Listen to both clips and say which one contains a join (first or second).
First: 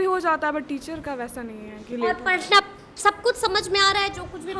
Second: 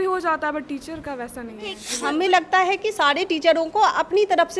second